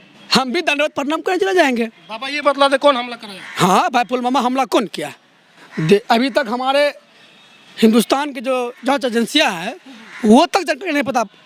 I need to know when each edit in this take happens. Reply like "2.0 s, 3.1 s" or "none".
none